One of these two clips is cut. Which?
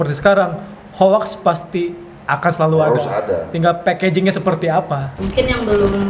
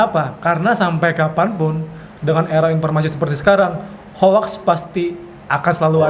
first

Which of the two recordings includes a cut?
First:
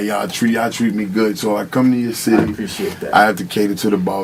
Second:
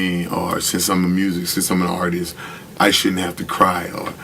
second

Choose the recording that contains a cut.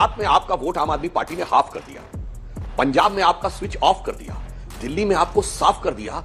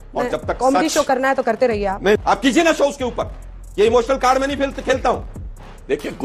second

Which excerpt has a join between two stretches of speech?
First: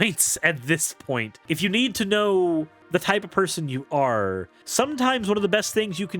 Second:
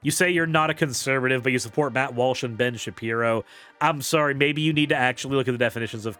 first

